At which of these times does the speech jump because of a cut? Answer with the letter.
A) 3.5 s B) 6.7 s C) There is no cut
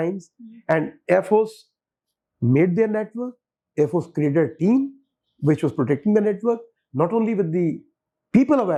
C